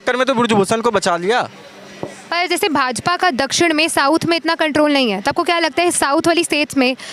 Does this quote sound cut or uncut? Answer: uncut